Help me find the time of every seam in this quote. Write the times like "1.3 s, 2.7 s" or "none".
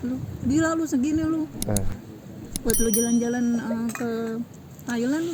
none